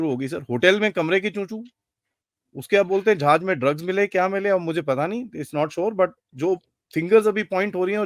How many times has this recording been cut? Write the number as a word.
one